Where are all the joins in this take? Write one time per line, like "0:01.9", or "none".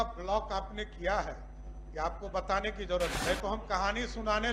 0:03.2